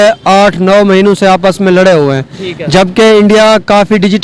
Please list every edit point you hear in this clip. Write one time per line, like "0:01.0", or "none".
none